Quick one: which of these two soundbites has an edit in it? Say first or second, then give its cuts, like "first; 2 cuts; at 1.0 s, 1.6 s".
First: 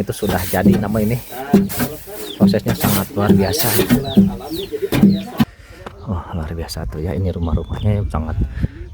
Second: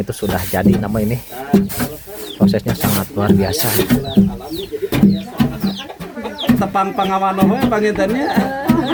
first; 1 cut; at 5.4 s